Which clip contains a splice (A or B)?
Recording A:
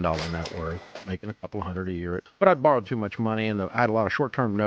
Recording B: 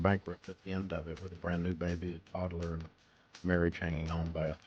A